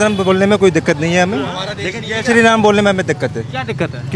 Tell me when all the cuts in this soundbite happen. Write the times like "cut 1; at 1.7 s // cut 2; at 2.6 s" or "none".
none